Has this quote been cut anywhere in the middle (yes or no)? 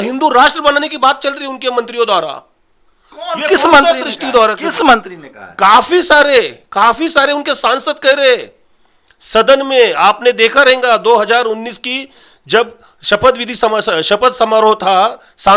no